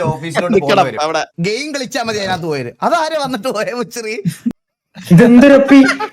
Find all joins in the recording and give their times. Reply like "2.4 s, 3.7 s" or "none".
1.3 s, 4.5 s